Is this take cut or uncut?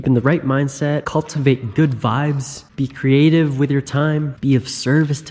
uncut